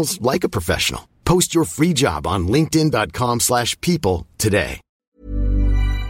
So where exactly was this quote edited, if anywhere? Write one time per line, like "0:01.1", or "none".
0:04.9